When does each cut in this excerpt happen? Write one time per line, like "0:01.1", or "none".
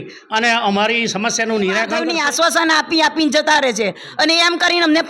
0:02.0